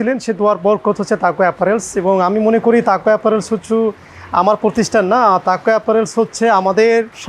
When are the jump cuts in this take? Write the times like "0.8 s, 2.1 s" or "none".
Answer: none